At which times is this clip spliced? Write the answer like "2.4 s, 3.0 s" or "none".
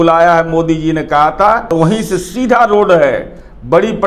1.7 s